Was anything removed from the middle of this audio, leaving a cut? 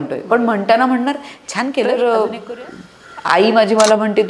yes; 1 cut; at 1.9 s

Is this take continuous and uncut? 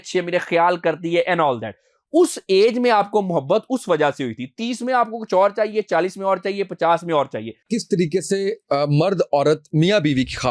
no; 1 cut; at 7.7 s

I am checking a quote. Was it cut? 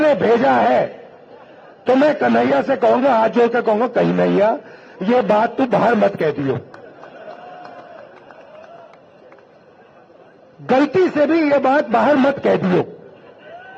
no; 0 cuts

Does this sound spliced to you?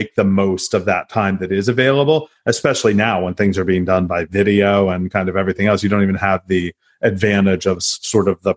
no; 0 cuts

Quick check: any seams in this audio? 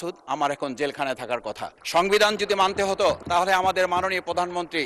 yes; 2 cuts; at 1.7 s, 3.2 s

